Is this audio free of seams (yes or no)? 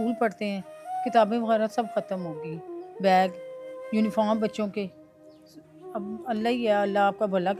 yes